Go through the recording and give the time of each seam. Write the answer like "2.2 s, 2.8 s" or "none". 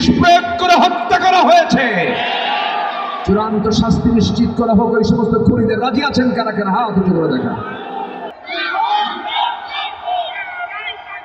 8.3 s